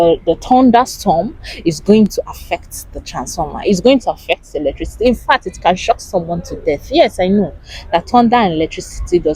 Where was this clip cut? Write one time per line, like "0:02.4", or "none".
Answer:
none